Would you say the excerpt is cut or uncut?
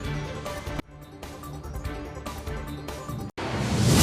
uncut